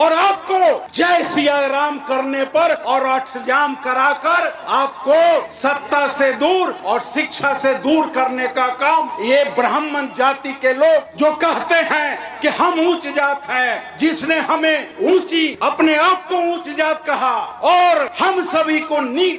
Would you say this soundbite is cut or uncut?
cut